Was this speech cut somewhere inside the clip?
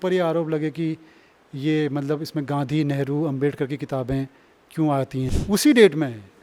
yes; 1 cut; at 5.3 s

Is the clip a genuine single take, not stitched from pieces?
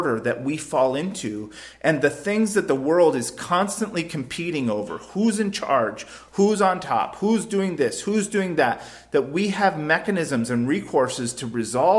yes; 0 cuts

